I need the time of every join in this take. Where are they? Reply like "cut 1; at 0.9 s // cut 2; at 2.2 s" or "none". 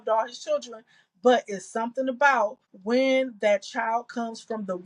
cut 1; at 2.7 s